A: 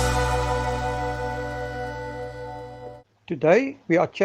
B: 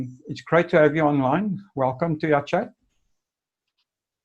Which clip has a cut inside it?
A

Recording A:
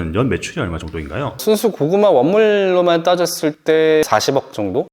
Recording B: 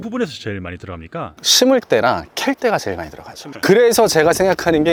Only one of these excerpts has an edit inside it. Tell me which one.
A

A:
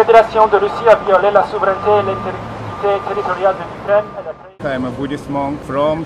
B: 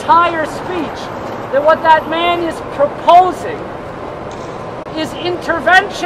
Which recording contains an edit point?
A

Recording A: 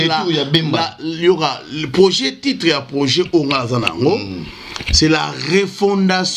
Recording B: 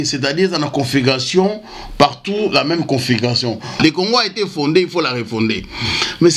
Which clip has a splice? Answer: B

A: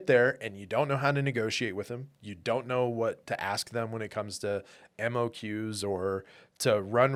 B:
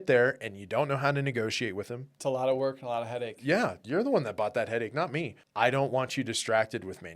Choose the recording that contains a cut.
B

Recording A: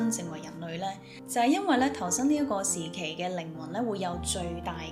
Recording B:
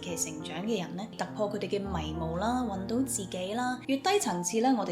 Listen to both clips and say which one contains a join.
B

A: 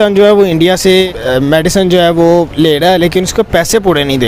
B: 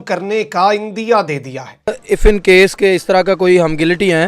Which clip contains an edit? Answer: B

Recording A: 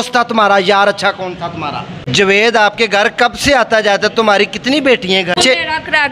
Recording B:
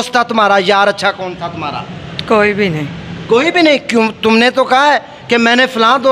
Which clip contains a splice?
A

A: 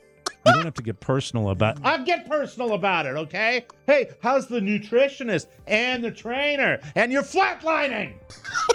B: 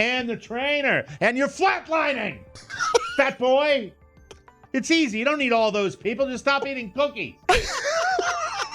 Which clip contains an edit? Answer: B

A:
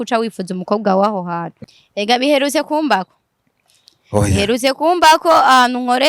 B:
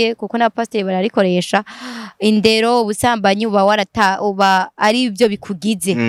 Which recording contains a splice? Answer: A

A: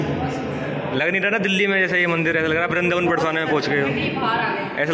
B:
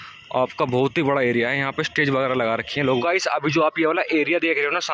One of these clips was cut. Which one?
B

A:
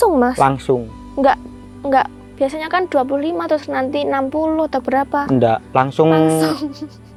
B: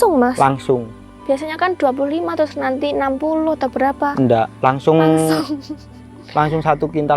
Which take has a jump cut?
B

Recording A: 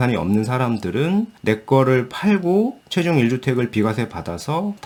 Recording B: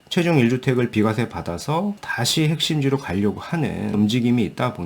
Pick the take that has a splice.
B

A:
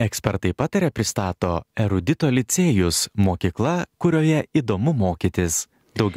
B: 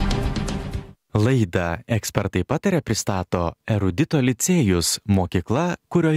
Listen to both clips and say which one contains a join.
B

